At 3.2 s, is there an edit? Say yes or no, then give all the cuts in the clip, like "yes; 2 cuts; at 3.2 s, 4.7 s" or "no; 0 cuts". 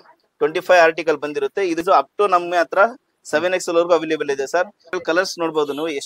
no; 2 cuts; at 1.8 s, 5.0 s